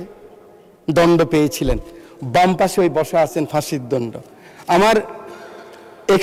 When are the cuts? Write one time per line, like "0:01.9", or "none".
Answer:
none